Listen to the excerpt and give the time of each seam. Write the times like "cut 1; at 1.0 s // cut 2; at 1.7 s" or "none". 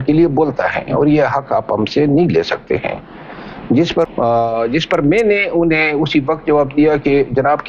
cut 1; at 4.1 s